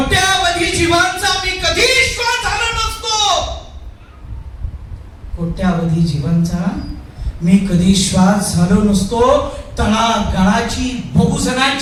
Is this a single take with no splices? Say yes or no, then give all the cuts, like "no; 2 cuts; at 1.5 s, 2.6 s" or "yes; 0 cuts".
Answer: yes; 0 cuts